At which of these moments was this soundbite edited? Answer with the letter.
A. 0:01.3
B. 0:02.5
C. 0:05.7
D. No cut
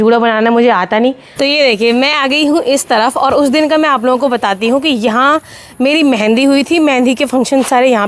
A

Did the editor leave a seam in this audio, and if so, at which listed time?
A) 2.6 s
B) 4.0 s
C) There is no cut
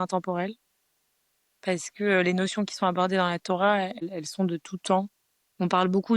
B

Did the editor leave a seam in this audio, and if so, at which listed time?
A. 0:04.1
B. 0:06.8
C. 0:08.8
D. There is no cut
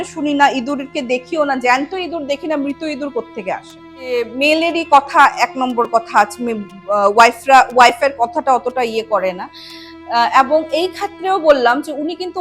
A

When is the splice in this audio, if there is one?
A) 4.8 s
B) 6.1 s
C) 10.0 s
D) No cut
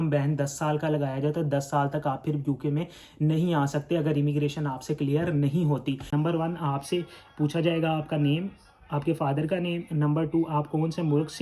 B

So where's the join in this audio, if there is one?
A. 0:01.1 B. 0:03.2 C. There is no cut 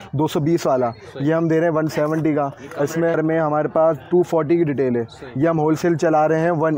B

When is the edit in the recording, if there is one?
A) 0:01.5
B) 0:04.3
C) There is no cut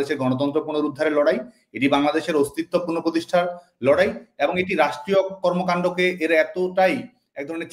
C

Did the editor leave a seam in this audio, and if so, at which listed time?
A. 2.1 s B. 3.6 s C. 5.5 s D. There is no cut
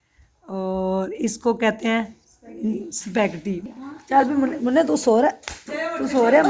B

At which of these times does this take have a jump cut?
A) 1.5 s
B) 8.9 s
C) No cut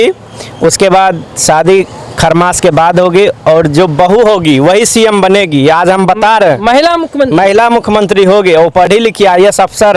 C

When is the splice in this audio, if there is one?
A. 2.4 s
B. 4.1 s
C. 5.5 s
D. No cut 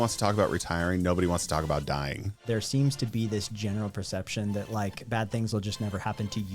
A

